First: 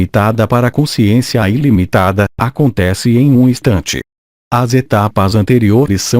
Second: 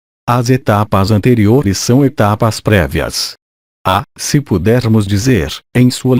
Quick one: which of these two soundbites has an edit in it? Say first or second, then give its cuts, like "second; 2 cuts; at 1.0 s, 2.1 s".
first; 1 cut; at 2.5 s